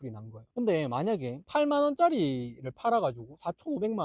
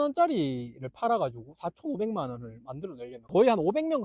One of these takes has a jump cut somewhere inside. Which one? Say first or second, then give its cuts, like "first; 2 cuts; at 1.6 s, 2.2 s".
second; 1 cut; at 3.1 s